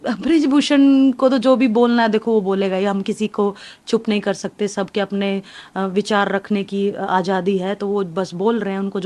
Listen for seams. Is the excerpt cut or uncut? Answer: uncut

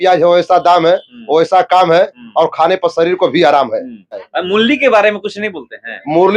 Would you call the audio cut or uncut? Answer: cut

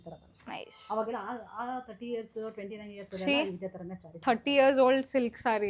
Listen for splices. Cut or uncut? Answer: uncut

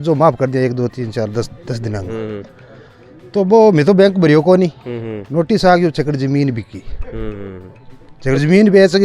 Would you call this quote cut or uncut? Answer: uncut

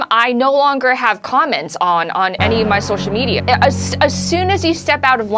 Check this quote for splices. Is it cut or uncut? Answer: cut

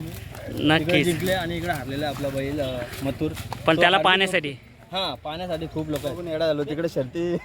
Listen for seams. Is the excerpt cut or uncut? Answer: cut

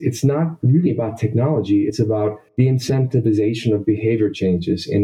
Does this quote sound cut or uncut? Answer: uncut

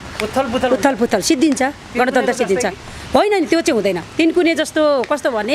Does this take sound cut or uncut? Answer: uncut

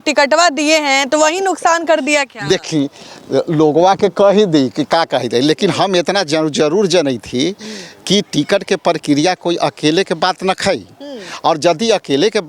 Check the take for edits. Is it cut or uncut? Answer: uncut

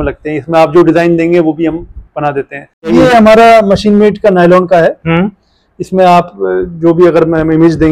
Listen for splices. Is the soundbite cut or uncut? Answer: cut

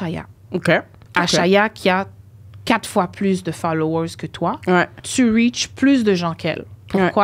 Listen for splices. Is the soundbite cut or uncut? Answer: cut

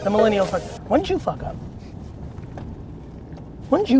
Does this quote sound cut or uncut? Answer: uncut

